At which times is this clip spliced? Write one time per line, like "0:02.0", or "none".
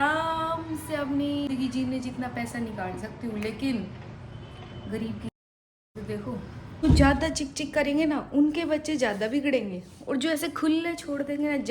0:01.5
0:06.8